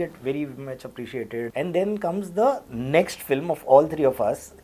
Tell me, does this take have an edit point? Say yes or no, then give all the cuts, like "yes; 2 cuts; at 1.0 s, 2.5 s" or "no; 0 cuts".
yes; 1 cut; at 1.5 s